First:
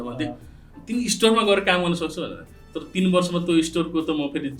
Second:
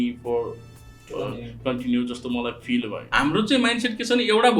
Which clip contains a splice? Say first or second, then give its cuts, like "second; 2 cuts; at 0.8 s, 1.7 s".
second; 1 cut; at 3.0 s